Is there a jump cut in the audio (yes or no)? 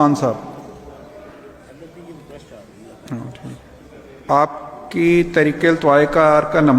yes